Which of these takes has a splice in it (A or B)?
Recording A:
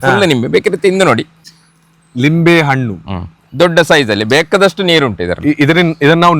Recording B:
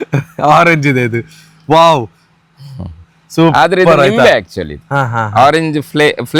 A